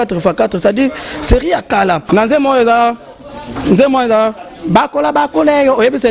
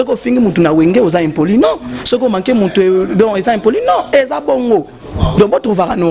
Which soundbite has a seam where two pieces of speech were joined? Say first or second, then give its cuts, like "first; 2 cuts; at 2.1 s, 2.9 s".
first; 1 cut; at 2.0 s